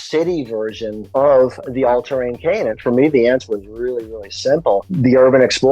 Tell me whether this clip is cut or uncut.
cut